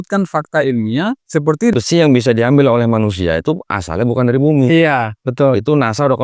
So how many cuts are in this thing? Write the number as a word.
one